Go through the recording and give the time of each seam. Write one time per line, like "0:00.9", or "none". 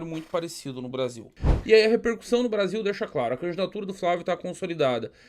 0:01.4